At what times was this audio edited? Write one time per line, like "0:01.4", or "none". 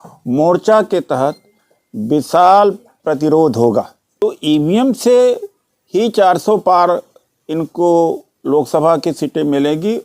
0:04.0